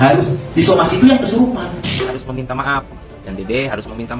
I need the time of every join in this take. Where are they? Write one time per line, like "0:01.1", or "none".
0:01.5